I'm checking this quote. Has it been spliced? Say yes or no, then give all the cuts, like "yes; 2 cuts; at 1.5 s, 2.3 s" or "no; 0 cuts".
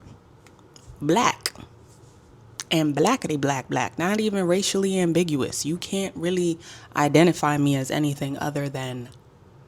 no; 0 cuts